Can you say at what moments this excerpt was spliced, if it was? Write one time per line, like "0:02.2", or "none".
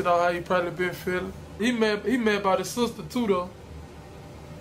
0:01.4